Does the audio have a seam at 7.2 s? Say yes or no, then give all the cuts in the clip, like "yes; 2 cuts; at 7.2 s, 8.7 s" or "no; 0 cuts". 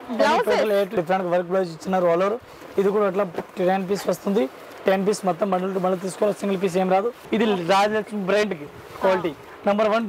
yes; 2 cuts; at 0.9 s, 7.2 s